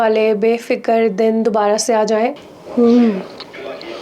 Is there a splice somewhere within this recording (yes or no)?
yes